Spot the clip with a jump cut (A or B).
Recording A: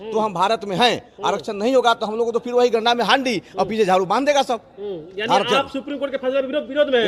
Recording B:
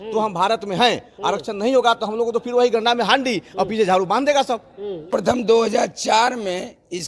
B